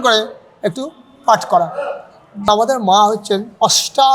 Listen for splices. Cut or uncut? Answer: cut